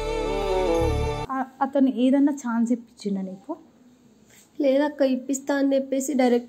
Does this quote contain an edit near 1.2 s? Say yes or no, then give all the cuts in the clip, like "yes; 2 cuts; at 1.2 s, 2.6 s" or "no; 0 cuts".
yes; 1 cut; at 1.2 s